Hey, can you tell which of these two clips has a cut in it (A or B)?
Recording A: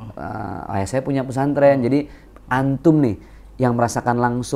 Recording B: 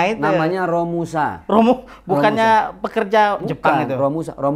A